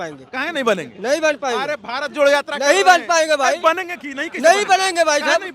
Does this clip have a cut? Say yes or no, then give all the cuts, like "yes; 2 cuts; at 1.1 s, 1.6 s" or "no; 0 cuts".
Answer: no; 0 cuts